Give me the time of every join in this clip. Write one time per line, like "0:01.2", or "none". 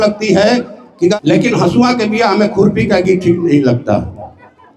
0:01.2

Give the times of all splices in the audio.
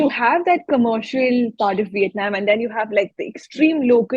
none

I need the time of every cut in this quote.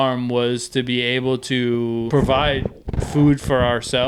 0:02.1

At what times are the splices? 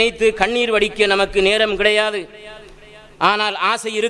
none

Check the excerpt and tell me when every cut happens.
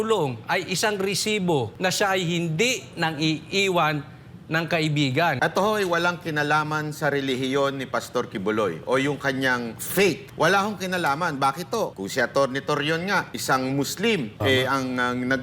0:01.7
0:05.4
0:10.0
0:12.0
0:13.3
0:14.3

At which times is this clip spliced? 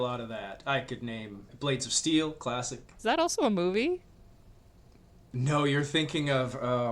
0:01.4
0:02.8

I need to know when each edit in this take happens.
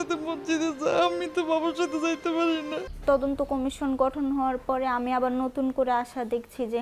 0:02.9

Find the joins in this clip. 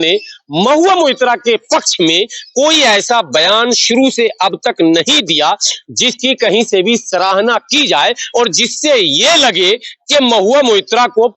none

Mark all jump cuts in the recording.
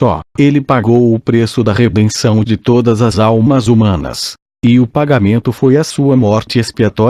0:01.7

